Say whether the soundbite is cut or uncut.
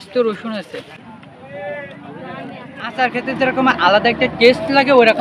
cut